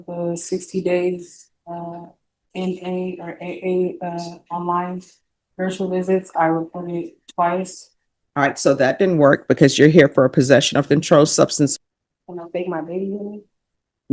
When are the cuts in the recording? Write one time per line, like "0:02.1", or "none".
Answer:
0:11.7